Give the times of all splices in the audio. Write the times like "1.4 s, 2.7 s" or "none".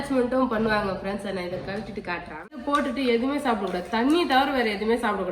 2.5 s